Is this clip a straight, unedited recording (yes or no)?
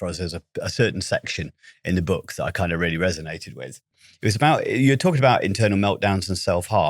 no